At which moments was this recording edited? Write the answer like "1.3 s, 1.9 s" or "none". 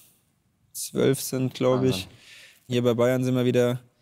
2.7 s